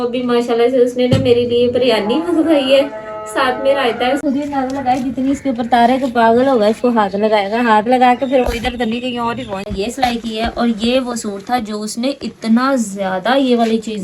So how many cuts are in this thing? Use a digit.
2